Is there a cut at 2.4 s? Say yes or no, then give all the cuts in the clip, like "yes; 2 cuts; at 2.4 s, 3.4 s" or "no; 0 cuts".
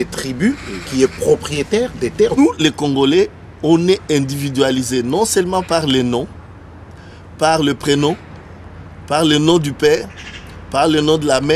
yes; 1 cut; at 2.4 s